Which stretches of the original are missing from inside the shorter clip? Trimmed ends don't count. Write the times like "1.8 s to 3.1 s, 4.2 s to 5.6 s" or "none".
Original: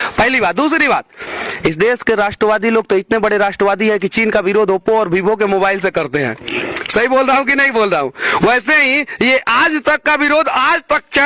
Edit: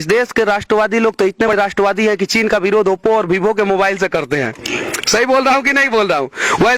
3.2 s to 3.3 s